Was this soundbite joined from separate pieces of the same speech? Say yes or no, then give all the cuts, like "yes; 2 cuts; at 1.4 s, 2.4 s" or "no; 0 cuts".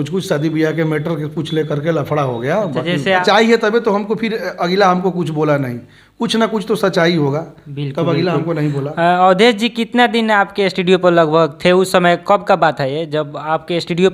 yes; 1 cut; at 2.8 s